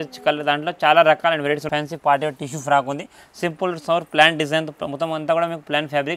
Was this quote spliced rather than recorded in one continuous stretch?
yes; 1 cut; at 1.6 s

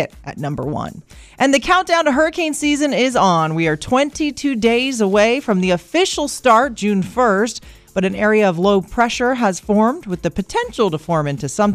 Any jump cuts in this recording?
no; 0 cuts

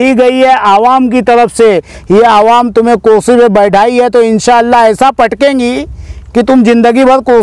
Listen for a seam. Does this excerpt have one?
no; 0 cuts

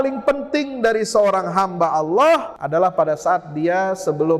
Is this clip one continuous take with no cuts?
no; 1 cut; at 2.5 s

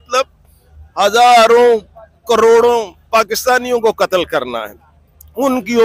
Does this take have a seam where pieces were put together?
no; 0 cuts

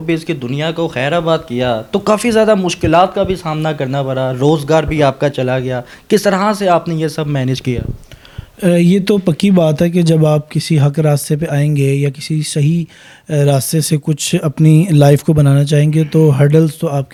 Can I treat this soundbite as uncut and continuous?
yes; 0 cuts

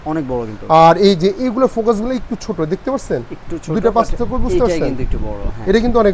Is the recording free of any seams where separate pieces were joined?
yes; 0 cuts

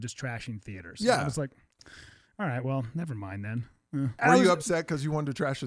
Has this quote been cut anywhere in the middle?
yes; 1 cut; at 4.1 s

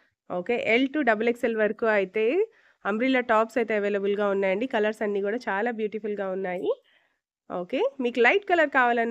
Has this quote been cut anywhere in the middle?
no; 0 cuts

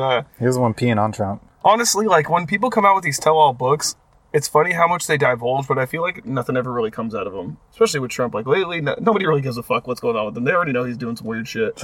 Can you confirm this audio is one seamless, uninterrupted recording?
yes; 0 cuts

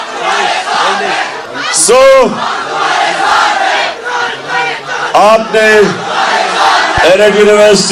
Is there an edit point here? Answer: yes; 1 cut; at 1.4 s

